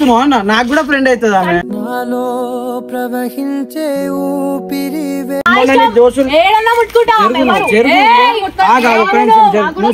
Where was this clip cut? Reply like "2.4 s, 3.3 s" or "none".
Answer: none